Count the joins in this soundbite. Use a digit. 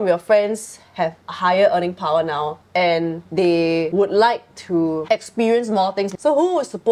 4